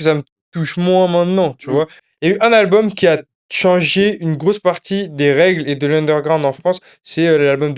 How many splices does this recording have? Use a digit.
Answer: 1